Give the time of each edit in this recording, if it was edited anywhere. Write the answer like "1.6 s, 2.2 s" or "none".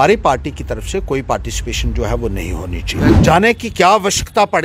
3.1 s